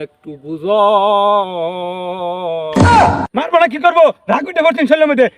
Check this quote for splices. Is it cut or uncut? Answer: cut